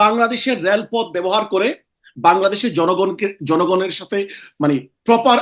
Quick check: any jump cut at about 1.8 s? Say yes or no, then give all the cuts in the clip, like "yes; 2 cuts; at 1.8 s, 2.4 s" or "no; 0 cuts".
no; 0 cuts